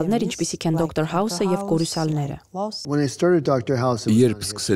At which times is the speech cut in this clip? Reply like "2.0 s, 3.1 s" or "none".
2.8 s